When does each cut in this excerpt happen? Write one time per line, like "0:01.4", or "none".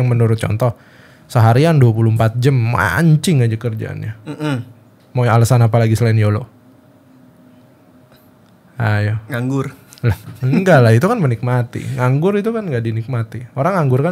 none